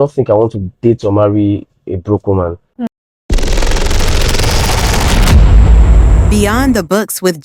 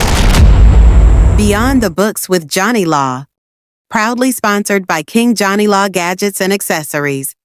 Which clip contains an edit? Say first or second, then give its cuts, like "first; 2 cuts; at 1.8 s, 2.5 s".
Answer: first; 1 cut; at 2.9 s